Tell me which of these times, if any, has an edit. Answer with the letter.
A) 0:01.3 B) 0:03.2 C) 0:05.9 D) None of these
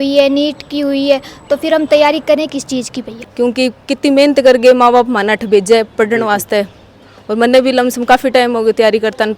B